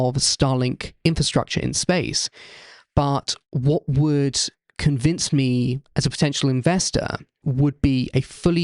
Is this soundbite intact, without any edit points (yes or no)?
no